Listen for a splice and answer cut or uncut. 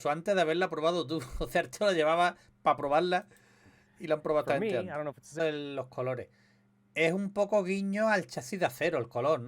cut